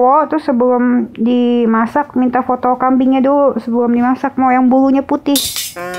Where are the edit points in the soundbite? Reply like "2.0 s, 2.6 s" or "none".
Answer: none